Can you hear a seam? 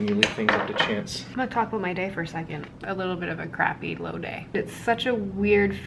yes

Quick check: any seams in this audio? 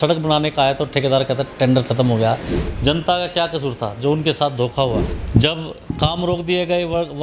yes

